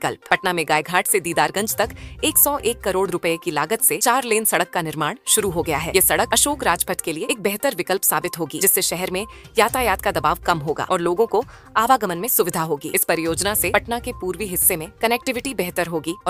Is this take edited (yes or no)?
no